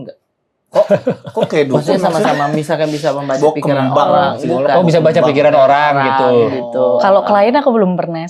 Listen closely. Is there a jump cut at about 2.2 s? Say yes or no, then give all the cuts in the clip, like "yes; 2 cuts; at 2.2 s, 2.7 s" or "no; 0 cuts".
no; 0 cuts